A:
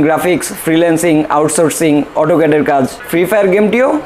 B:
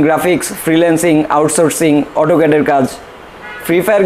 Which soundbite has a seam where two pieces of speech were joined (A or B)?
A